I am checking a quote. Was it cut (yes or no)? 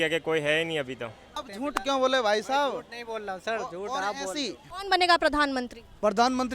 yes